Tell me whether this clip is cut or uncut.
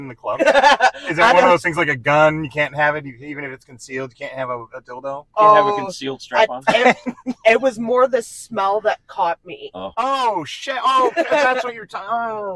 uncut